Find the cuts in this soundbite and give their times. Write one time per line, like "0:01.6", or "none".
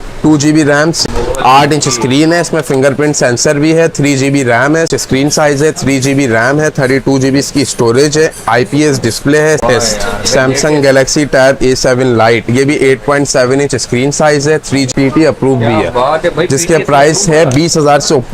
0:01.1
0:04.9
0:09.6
0:14.9